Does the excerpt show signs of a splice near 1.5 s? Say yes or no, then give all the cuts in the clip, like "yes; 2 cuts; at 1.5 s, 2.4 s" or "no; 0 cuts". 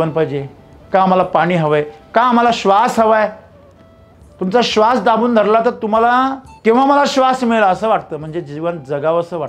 no; 1 cut; at 6.5 s